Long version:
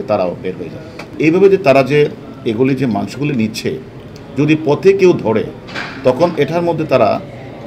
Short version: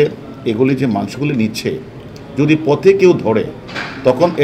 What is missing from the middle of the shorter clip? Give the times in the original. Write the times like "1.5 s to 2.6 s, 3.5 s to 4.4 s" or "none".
none